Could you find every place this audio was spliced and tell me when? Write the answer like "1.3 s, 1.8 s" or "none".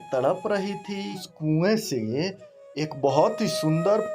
1.3 s